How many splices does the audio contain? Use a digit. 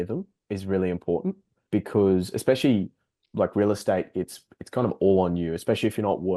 1